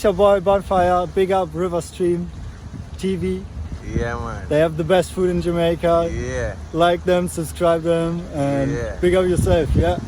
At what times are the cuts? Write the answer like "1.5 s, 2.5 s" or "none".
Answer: none

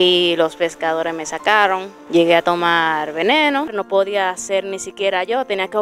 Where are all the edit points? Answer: 1.9 s, 3.8 s

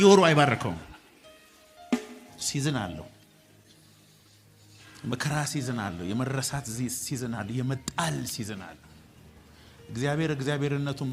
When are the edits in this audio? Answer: none

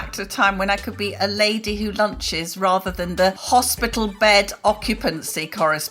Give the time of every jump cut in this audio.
3.4 s

